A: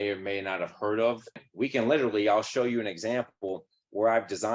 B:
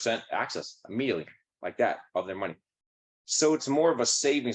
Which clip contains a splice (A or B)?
A